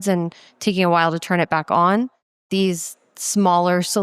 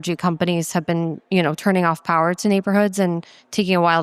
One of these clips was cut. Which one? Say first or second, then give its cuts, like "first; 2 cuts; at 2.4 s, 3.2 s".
first; 1 cut; at 2.4 s